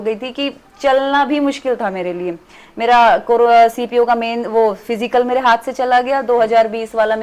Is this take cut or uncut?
uncut